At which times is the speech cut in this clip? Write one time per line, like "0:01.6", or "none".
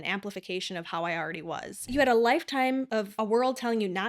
0:01.9
0:03.1